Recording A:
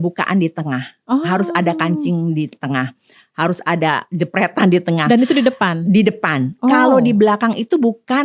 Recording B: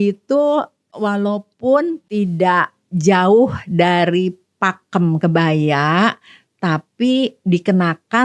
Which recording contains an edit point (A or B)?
B